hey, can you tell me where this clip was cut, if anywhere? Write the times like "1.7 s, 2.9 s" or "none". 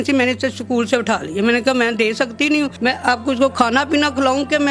2.7 s